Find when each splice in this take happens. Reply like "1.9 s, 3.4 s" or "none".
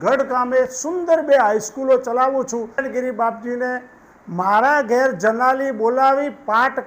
2.8 s